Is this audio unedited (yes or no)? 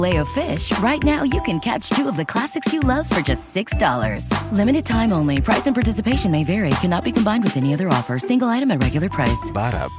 yes